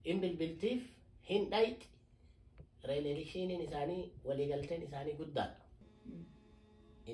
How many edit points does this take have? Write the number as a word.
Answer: one